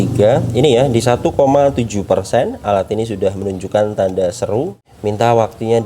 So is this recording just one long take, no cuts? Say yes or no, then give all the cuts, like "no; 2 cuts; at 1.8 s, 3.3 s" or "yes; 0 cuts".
no; 1 cut; at 4.8 s